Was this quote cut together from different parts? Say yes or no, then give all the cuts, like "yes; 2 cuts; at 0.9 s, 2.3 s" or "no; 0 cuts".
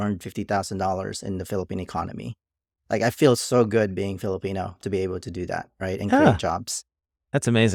no; 0 cuts